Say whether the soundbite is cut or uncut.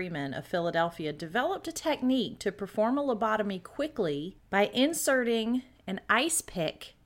cut